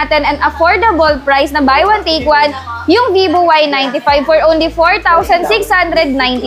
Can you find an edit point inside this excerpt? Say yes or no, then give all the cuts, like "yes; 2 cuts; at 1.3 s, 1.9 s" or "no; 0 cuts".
no; 0 cuts